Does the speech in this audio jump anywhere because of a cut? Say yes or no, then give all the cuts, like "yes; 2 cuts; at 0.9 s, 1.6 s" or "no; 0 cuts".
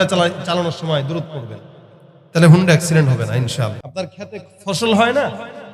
yes; 1 cut; at 3.8 s